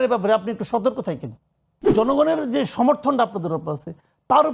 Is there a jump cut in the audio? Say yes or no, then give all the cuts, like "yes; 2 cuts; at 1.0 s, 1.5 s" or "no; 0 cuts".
yes; 1 cut; at 1.9 s